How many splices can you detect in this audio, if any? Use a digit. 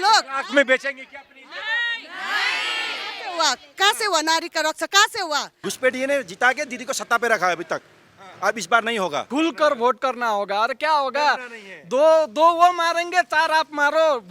2